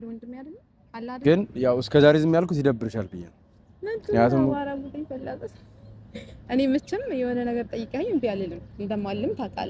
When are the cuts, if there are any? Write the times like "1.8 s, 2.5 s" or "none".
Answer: 1.2 s